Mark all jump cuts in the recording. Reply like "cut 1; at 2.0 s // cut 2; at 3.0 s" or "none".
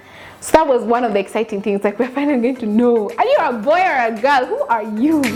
none